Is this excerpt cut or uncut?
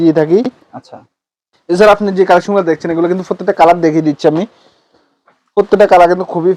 uncut